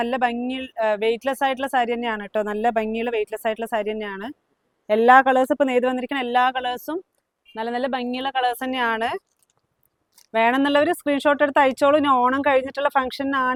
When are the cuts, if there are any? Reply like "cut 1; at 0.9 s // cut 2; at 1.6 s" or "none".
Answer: none